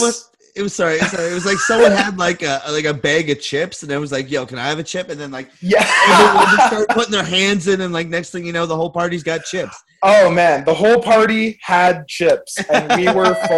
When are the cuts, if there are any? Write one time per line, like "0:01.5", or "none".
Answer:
none